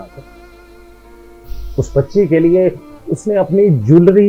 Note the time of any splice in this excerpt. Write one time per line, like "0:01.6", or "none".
none